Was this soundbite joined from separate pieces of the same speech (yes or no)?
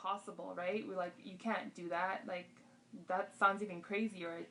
no